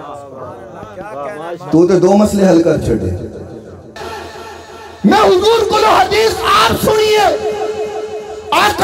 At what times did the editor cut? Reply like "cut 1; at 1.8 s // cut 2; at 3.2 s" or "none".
cut 1; at 4.0 s

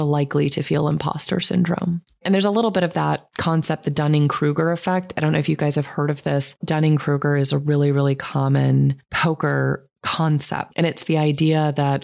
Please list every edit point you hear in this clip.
cut 1; at 2.2 s // cut 2; at 3.3 s // cut 3; at 6.6 s

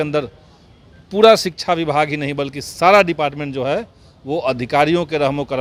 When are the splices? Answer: none

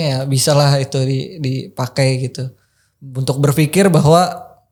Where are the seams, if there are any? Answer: none

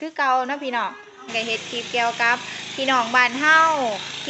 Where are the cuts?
cut 1; at 1.2 s

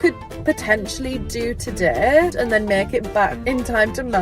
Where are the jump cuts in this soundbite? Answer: cut 1; at 2.3 s // cut 2; at 3.4 s

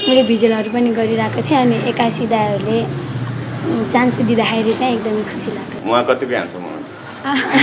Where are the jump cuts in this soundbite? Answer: cut 1; at 5.8 s

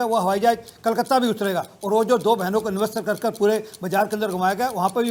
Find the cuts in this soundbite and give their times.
none

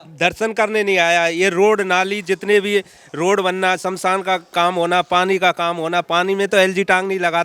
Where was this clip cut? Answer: none

